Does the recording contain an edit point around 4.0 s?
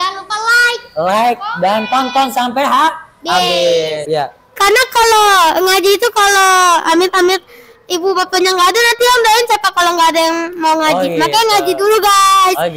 yes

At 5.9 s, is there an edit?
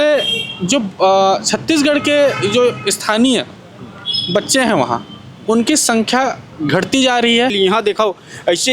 no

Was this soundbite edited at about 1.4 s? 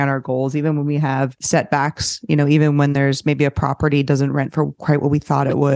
yes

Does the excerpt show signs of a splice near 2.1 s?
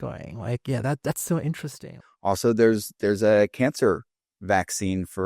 yes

